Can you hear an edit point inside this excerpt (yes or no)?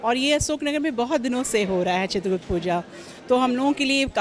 no